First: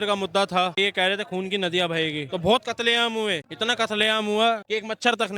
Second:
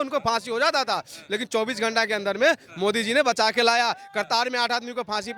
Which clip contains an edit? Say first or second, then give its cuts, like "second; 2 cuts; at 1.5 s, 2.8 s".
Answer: first; 3 cuts; at 0.8 s, 2.2 s, 3.5 s